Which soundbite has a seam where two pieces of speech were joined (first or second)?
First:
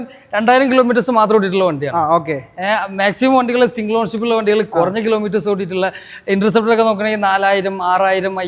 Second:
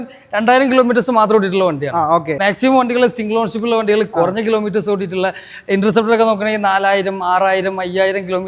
second